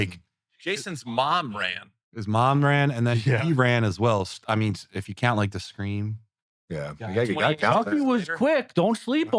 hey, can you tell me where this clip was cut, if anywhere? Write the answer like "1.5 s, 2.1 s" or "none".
none